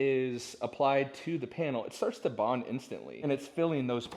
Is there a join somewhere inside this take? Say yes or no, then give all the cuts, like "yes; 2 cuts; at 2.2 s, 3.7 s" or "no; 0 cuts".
yes; 1 cut; at 3.2 s